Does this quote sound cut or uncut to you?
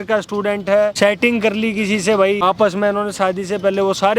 cut